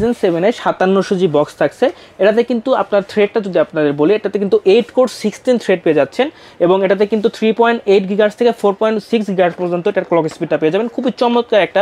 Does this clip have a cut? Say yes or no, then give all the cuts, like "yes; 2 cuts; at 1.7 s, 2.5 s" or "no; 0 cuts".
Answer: no; 0 cuts